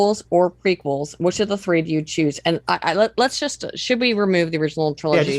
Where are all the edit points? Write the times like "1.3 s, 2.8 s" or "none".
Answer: none